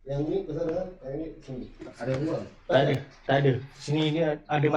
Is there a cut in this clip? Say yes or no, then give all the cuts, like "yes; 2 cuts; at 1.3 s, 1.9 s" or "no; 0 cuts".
no; 0 cuts